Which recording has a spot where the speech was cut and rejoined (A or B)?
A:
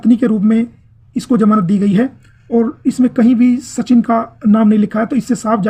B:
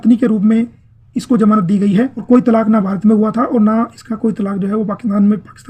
B